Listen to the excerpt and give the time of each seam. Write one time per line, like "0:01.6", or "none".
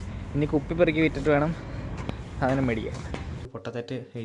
0:03.4